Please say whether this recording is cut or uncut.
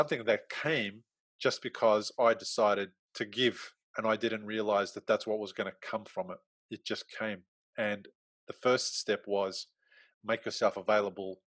cut